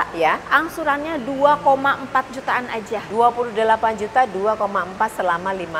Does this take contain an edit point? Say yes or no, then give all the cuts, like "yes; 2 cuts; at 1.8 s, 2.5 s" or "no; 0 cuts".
no; 0 cuts